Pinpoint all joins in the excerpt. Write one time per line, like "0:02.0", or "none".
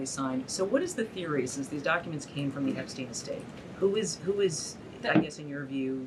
none

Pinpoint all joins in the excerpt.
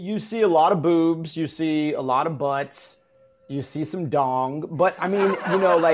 none

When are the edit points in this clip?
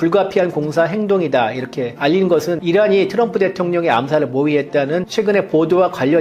0:02.6
0:05.1

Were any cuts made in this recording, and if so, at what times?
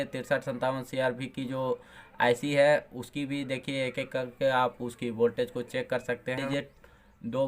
0:06.4

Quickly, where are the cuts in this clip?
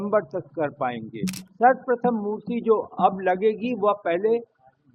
0:01.4

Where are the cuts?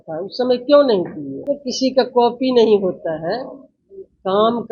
0:01.3

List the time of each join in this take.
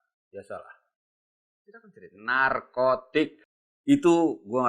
0:03.4

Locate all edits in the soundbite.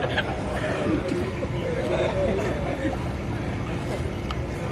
none

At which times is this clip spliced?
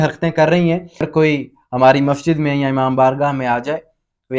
0:01.0

